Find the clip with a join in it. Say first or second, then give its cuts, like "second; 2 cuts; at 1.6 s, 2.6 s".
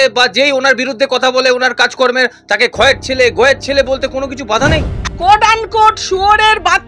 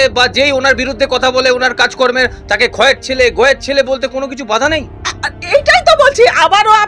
first; 1 cut; at 5.1 s